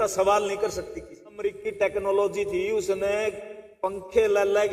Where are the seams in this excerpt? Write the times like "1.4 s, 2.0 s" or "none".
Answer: 1.5 s